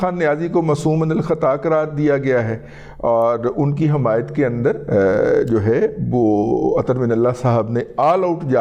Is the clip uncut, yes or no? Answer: yes